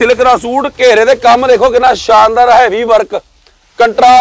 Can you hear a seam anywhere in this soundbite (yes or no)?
no